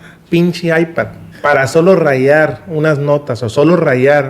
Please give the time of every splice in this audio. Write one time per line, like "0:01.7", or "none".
0:01.2